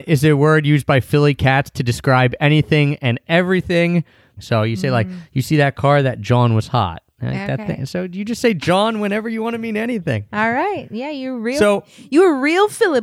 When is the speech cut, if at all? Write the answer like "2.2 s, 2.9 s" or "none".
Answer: 4.3 s